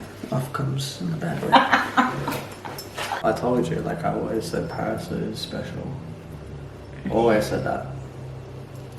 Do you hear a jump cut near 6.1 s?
no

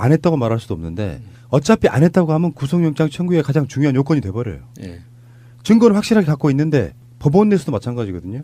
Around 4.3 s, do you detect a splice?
no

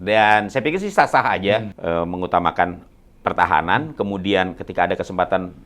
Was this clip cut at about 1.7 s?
yes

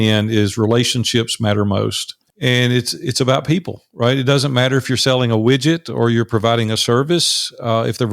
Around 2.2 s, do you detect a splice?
yes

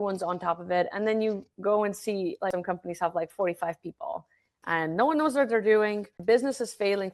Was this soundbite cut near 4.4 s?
no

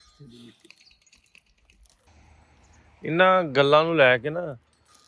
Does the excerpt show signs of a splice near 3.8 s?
no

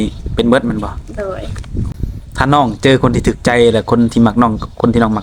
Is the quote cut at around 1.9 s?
yes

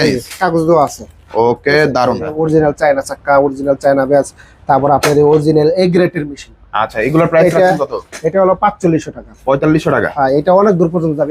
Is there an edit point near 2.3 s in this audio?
yes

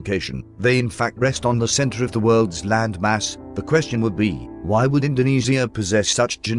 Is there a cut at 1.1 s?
yes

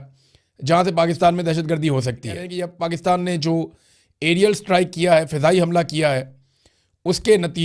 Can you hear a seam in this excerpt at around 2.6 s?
yes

